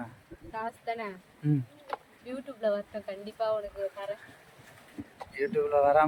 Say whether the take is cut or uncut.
uncut